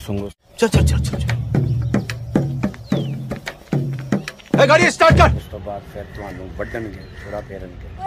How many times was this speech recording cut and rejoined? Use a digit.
0